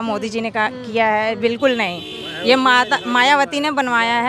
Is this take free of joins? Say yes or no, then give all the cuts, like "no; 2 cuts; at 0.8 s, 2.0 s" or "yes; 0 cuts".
yes; 0 cuts